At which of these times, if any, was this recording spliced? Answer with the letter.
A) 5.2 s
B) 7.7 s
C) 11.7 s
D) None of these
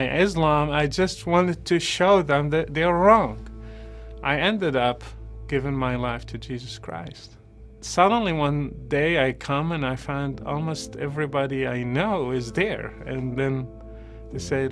B